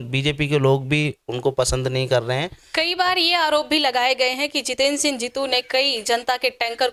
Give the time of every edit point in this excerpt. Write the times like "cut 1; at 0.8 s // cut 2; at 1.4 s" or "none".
cut 1; at 2.6 s